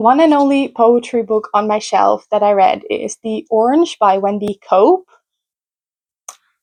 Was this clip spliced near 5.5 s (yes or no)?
no